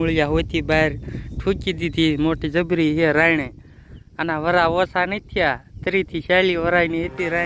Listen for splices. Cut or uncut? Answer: uncut